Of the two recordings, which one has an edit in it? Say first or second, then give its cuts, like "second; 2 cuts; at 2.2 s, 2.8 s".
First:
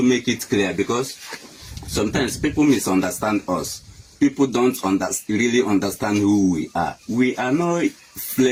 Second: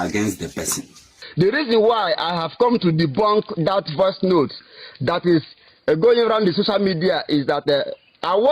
second; 1 cut; at 1.2 s